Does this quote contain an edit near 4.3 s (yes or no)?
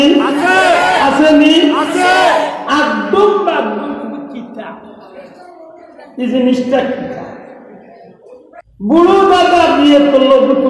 no